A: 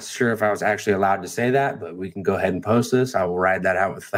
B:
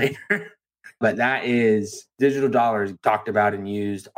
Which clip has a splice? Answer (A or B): B